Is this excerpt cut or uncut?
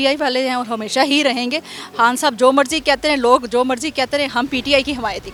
uncut